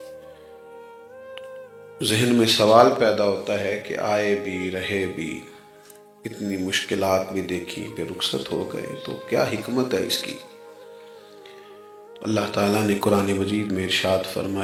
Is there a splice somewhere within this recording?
no; 0 cuts

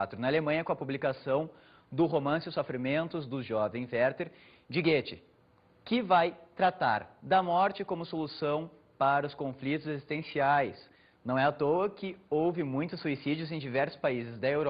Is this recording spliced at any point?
no; 0 cuts

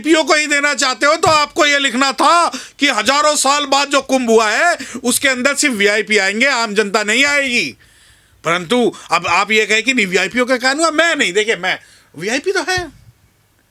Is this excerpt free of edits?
yes; 0 cuts

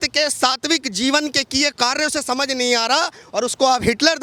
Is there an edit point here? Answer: no; 0 cuts

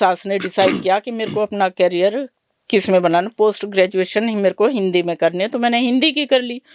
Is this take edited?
no; 0 cuts

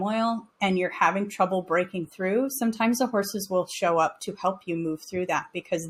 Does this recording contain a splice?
no; 0 cuts

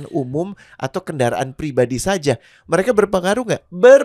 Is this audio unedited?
yes; 0 cuts

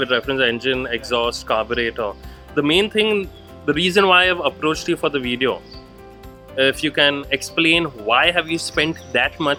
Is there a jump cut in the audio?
no; 0 cuts

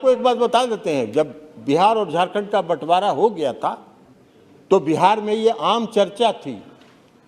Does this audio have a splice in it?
no; 0 cuts

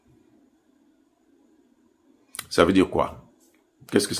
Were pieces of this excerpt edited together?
no; 0 cuts

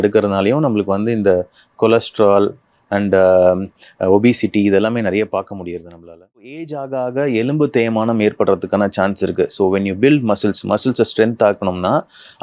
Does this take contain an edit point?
yes; 1 cut; at 6.5 s

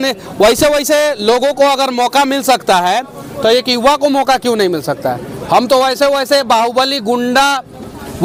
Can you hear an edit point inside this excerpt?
no; 0 cuts

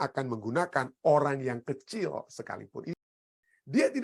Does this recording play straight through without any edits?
no; 1 cut; at 3.0 s

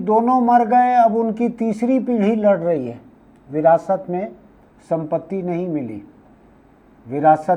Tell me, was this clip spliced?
no; 0 cuts

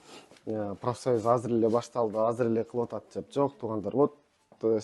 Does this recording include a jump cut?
no; 0 cuts

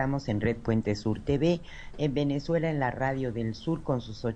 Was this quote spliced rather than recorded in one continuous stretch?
yes; 1 cut; at 3.2 s

